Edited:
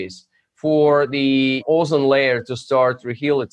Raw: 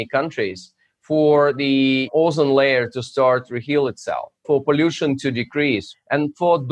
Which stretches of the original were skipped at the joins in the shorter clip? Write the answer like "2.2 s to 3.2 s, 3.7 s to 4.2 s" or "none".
none